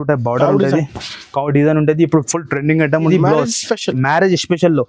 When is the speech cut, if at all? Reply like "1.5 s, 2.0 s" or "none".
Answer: 3.1 s